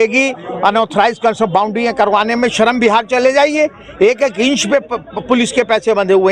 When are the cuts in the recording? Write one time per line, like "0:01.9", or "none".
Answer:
none